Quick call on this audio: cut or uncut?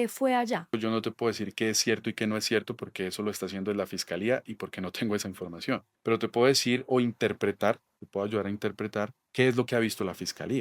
cut